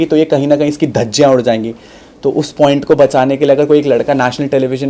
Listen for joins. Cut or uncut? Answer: uncut